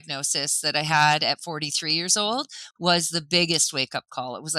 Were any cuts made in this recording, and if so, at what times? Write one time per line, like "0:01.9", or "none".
none

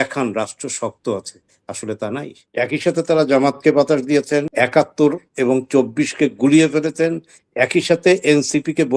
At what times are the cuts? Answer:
0:02.4
0:04.5

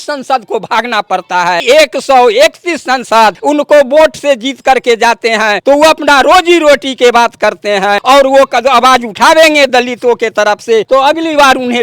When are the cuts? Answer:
0:01.6
0:03.4
0:05.6
0:08.0
0:10.9

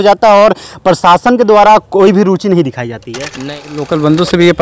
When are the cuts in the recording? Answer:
0:03.5

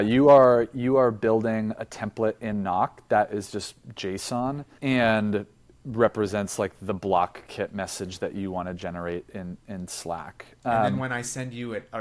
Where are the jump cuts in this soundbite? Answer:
0:04.7

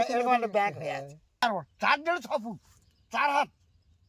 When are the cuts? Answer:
0:01.4

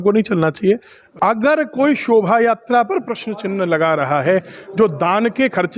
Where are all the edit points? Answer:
0:01.0

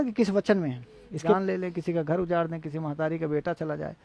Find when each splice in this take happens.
0:01.2

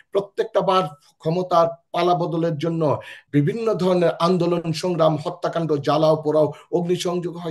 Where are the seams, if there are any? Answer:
0:03.1

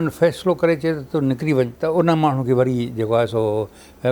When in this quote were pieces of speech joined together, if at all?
0:01.8

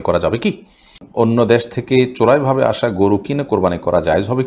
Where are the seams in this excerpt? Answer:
0:01.0

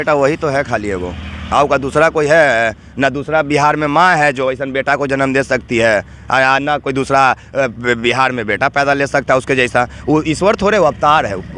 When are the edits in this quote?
none

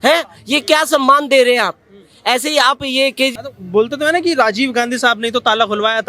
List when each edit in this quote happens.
0:03.4

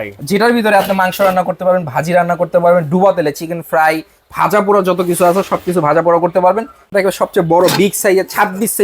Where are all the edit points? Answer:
0:06.9

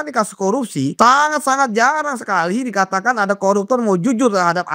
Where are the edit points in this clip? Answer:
0:01.0

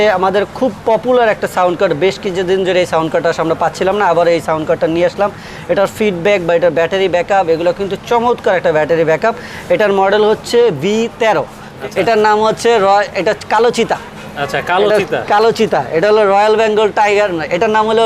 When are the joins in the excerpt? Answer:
0:11.7

